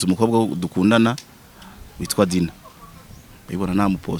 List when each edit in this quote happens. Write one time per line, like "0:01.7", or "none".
none